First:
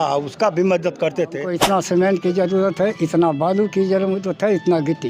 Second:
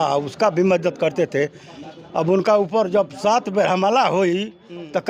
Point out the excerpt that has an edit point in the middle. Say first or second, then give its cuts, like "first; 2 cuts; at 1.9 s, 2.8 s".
first; 1 cut; at 1.5 s